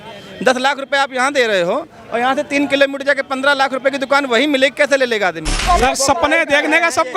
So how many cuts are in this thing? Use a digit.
1